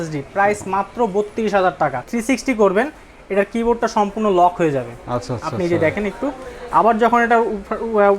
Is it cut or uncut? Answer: cut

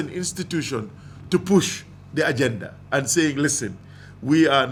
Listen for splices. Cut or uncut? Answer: uncut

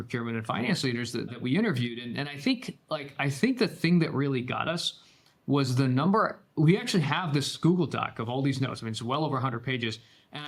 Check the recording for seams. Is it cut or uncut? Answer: uncut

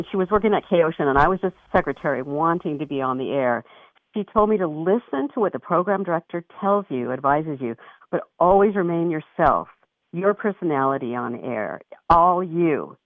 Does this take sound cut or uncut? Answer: cut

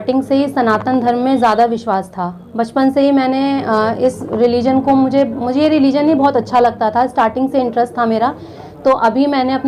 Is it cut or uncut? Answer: uncut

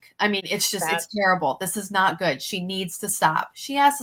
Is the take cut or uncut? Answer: uncut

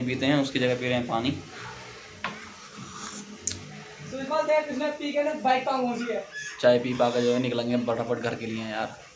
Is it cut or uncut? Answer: uncut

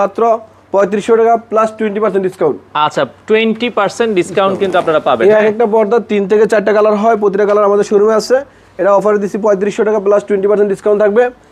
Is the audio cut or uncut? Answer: uncut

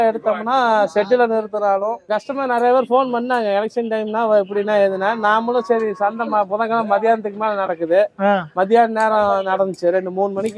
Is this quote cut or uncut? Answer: cut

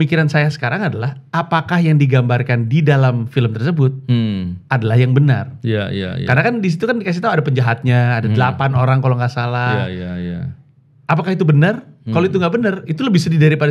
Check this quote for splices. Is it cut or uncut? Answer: uncut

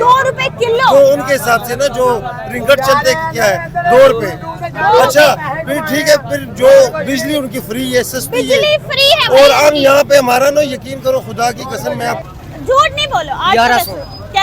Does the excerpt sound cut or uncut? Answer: cut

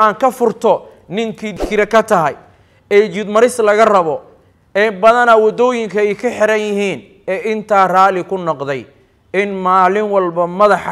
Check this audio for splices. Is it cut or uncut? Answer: cut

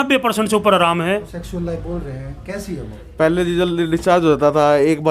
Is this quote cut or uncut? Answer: cut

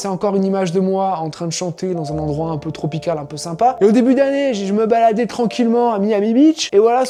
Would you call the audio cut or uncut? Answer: uncut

